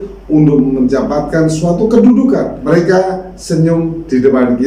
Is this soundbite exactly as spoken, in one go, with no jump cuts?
no; 1 cut; at 2.6 s

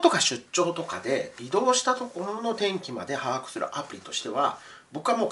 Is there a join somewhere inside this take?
no; 0 cuts

